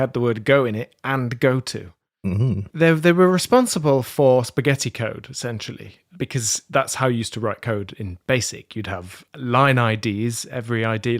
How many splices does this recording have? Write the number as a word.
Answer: two